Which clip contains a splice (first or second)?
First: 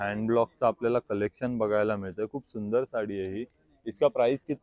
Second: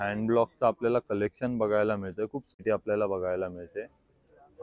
second